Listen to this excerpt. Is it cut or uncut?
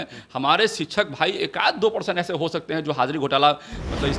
uncut